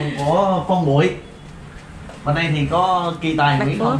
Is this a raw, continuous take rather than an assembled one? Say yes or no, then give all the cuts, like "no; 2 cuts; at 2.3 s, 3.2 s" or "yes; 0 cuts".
yes; 0 cuts